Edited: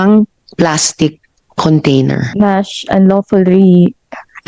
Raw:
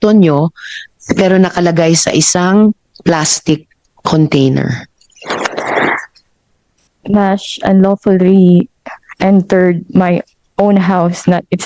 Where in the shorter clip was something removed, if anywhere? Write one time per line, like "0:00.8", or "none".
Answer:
0:02.3